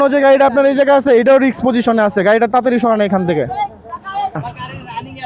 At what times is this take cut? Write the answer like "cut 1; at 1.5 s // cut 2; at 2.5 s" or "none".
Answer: none